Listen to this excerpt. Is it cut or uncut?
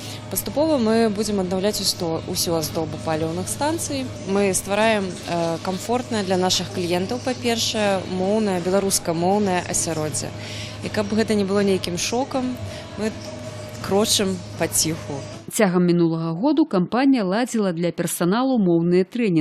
uncut